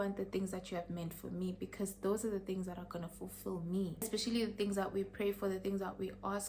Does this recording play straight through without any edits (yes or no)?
no